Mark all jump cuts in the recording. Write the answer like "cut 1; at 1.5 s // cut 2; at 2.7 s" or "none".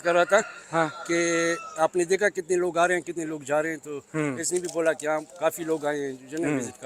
none